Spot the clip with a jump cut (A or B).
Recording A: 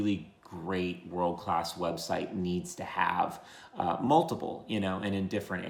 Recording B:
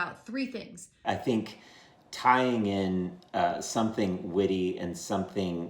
B